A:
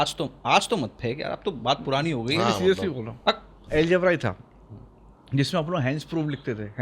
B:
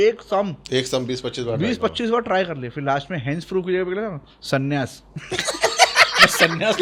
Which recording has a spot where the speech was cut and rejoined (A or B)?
A